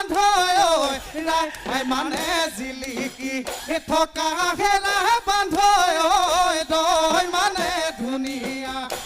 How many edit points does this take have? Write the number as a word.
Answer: zero